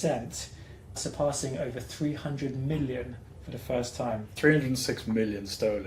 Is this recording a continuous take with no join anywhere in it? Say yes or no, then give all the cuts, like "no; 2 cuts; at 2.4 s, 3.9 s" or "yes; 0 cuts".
no; 2 cuts; at 1.0 s, 4.3 s